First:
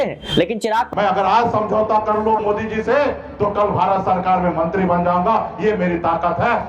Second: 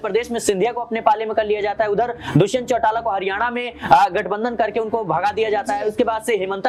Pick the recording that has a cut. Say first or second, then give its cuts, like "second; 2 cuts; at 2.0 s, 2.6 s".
first; 1 cut; at 0.9 s